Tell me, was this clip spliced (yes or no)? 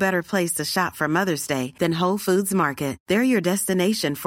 no